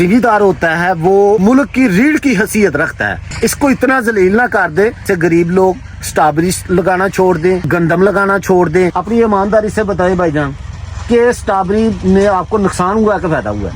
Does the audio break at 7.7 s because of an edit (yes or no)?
yes